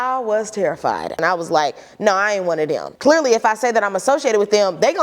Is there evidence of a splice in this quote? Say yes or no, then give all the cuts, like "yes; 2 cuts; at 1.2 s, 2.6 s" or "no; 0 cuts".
yes; 2 cuts; at 1.2 s, 2.9 s